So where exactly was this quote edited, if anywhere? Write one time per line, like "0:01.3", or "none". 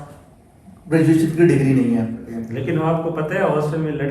0:02.3